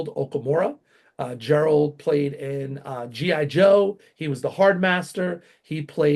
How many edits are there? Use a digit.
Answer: 0